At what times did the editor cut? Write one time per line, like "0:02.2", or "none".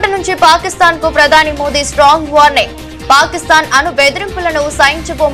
none